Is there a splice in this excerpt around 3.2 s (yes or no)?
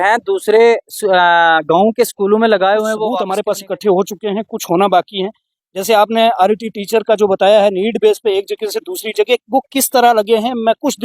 yes